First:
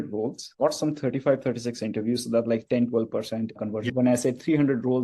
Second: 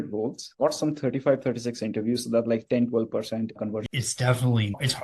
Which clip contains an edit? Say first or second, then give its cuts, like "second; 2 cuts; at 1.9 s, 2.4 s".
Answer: second; 1 cut; at 3.8 s